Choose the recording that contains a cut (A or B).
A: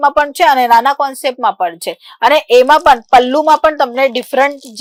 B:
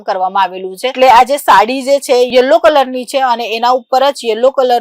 B